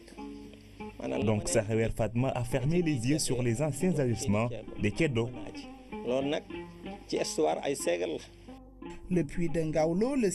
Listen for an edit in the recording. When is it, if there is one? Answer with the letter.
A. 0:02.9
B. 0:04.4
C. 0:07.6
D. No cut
C